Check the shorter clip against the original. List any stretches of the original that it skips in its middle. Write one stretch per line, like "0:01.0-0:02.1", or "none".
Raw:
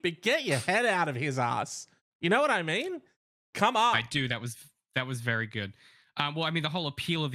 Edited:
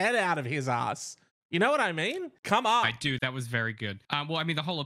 0:03.0-0:03.4
0:04.3-0:04.9
0:05.7-0:06.1